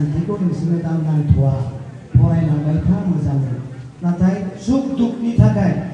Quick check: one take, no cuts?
yes; 0 cuts

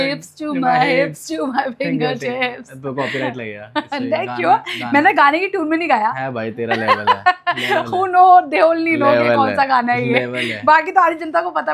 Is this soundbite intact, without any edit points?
yes; 0 cuts

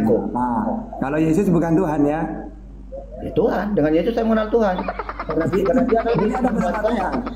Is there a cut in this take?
no; 0 cuts

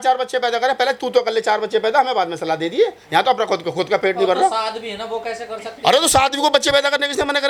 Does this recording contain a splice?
no; 0 cuts

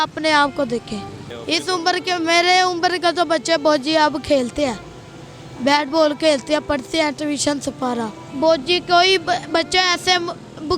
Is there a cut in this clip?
yes; 2 cuts; at 1.3 s, 8.2 s

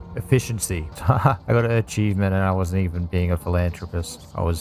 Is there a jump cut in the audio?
yes; 1 cut; at 0.9 s

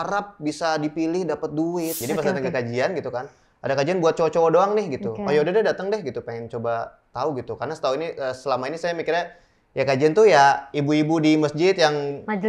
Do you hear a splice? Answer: yes; 1 cut; at 2.0 s

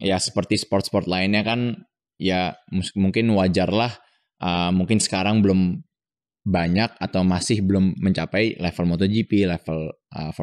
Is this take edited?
no; 0 cuts

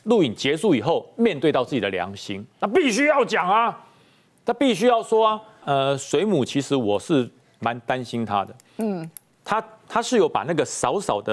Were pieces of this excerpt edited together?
yes; 1 cut; at 5.6 s

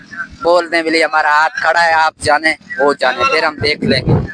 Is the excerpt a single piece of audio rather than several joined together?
yes; 0 cuts

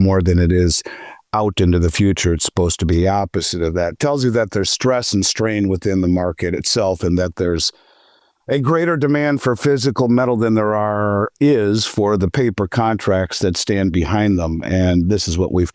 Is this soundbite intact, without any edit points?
yes; 0 cuts

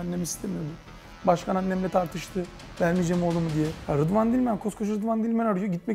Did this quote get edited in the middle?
yes; 1 cut; at 3.8 s

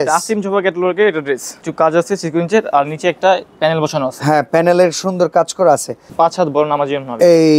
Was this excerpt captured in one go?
no; 2 cuts; at 1.6 s, 6.0 s

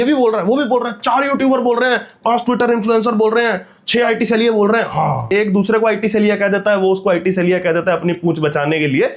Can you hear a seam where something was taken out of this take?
yes; 1 cut; at 5.3 s

